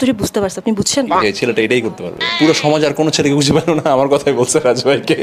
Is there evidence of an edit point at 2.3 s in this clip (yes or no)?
yes